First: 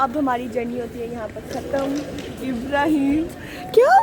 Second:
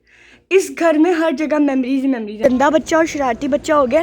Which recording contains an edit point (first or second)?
second